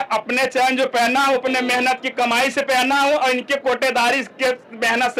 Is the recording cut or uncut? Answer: uncut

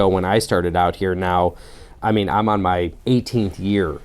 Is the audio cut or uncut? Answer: cut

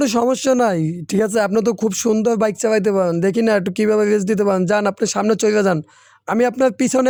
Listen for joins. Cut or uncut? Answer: uncut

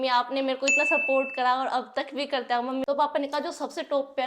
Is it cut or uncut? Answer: cut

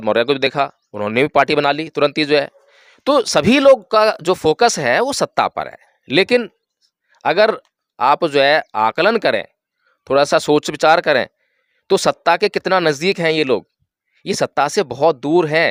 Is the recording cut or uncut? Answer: uncut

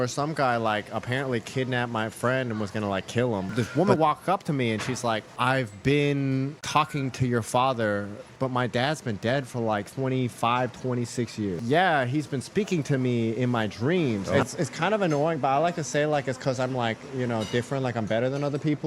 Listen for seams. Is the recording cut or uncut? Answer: cut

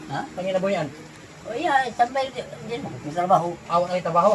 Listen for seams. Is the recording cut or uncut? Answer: uncut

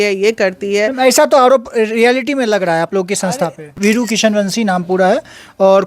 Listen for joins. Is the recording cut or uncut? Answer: cut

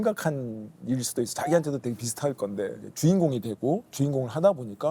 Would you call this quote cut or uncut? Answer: cut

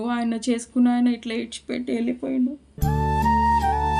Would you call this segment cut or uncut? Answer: uncut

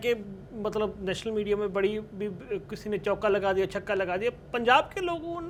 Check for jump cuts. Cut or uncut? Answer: uncut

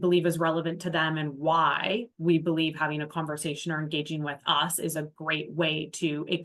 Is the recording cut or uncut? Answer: uncut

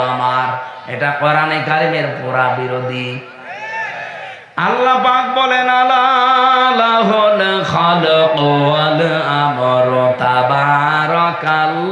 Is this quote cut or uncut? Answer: uncut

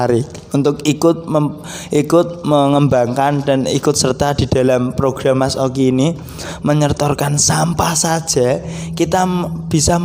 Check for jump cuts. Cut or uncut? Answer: uncut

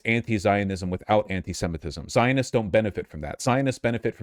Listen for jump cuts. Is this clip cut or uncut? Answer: uncut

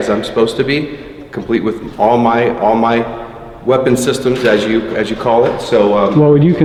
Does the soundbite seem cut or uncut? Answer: uncut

